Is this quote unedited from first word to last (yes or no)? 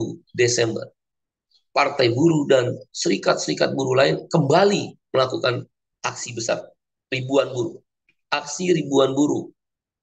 no